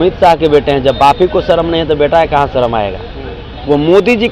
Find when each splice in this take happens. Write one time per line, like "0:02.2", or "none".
none